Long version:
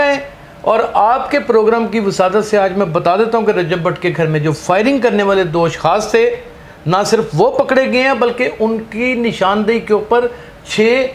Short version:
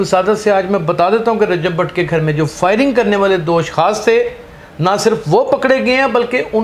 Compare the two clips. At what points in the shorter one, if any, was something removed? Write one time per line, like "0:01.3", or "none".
none